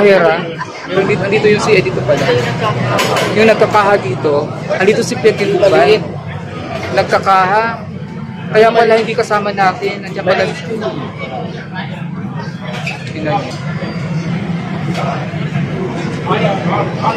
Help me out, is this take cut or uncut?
cut